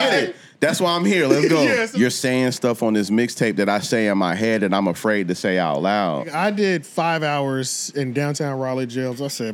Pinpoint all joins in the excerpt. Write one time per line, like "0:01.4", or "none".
0:01.9
0:06.3